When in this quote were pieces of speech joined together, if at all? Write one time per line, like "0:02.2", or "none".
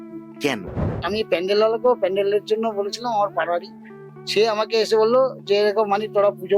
0:01.0